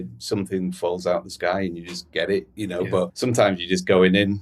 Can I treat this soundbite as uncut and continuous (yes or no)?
no